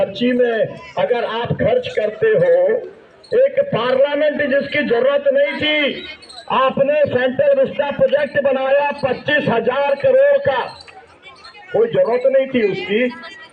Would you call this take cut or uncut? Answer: uncut